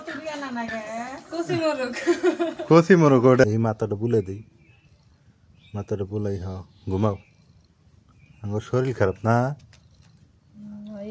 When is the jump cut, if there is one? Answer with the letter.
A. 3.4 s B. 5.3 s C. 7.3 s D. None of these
A